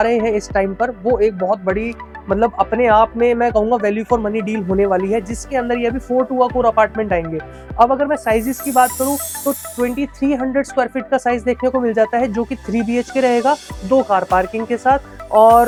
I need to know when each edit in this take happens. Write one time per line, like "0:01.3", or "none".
none

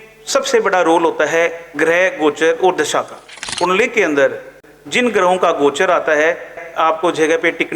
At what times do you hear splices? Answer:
0:03.4
0:04.6
0:06.6

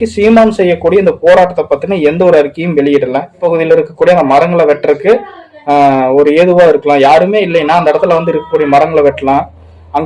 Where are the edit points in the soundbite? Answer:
0:03.4

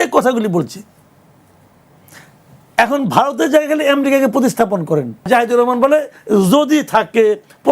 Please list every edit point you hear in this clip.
0:05.3

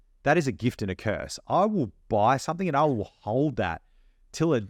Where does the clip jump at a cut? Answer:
none

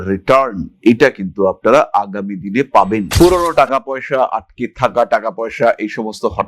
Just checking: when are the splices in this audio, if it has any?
0:03.1

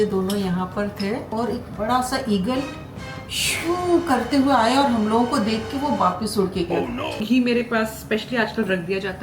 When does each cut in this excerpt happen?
0:01.3
0:07.2

